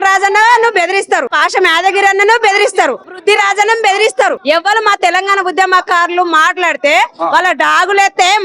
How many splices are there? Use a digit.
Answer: 3